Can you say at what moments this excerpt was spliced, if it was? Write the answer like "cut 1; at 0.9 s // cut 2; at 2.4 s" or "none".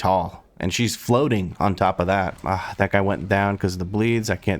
cut 1; at 2.3 s